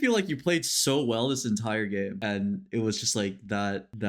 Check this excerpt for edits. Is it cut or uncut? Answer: cut